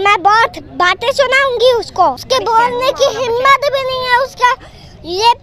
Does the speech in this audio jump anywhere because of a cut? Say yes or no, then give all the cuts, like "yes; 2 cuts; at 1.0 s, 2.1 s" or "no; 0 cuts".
yes; 1 cut; at 2.2 s